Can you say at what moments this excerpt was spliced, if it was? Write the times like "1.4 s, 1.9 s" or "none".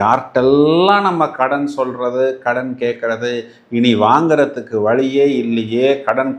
none